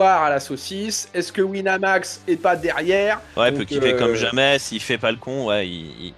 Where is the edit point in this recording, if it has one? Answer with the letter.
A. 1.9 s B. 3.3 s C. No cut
B